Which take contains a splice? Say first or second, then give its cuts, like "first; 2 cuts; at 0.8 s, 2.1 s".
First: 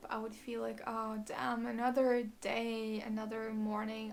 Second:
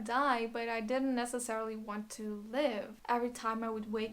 second; 1 cut; at 3.0 s